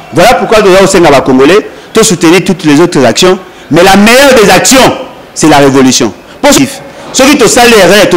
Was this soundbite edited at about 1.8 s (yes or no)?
no